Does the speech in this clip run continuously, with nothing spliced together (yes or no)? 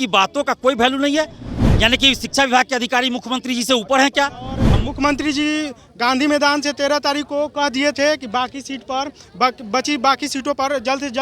no